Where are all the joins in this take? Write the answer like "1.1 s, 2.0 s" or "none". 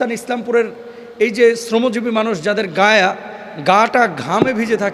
none